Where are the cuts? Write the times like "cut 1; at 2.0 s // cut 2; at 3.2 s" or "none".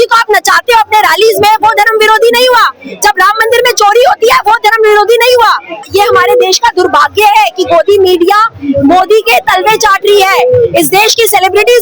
cut 1; at 5.8 s